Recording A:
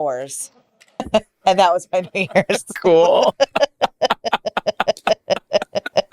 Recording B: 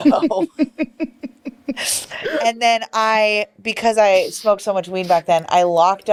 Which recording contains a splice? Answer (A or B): A